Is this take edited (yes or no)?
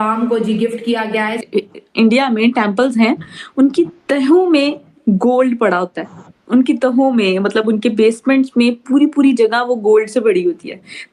yes